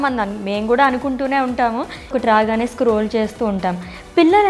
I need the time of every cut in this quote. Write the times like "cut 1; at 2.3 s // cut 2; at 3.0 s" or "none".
cut 1; at 2.1 s